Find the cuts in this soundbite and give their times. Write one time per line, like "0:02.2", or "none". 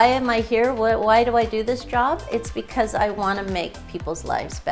none